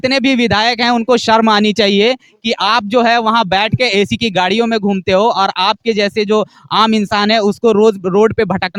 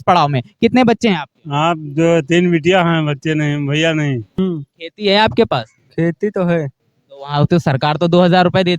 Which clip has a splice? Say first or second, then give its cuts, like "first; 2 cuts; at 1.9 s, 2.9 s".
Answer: second; 1 cut; at 4.4 s